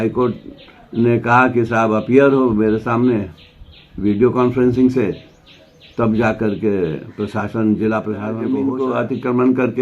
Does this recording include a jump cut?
yes; 1 cut; at 8.4 s

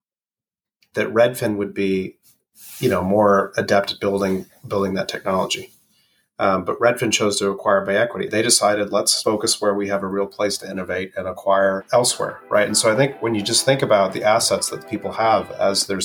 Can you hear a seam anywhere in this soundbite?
yes; 3 cuts; at 8.3 s, 9.2 s, 11.8 s

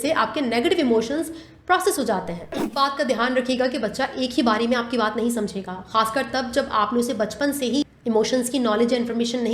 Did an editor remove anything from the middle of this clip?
yes; 2 cuts; at 2.7 s, 7.8 s

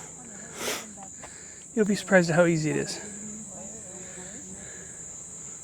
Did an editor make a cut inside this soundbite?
no; 0 cuts

